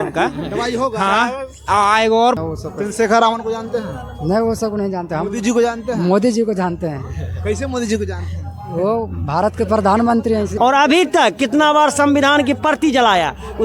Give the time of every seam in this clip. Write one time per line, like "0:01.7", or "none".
0:02.4
0:10.5